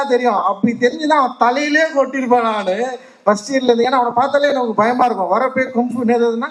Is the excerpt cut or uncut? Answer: uncut